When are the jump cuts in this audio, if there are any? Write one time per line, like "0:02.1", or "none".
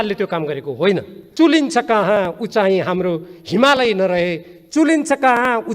0:01.2